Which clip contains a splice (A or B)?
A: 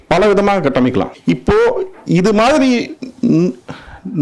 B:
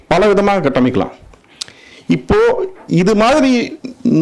A